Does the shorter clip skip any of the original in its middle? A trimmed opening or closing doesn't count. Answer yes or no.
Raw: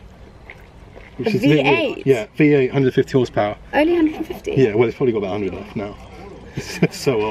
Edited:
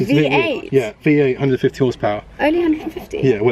no